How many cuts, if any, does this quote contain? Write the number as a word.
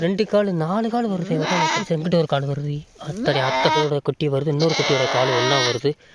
two